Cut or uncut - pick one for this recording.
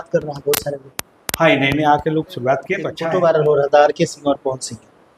cut